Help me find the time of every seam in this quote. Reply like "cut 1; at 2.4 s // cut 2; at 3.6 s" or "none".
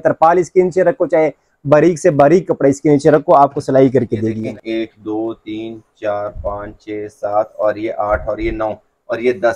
cut 1; at 4.3 s